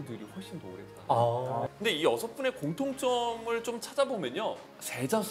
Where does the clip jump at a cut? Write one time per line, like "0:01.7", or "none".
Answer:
0:01.7